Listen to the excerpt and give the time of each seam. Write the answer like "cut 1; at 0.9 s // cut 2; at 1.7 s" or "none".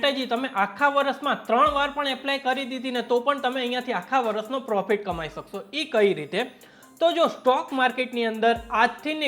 none